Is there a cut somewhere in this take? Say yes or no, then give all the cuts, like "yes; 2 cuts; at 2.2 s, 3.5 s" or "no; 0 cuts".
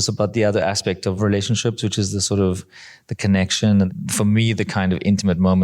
yes; 2 cuts; at 1.2 s, 3.9 s